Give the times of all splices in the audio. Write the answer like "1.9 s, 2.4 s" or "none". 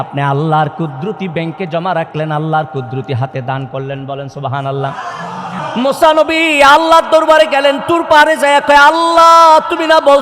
5.6 s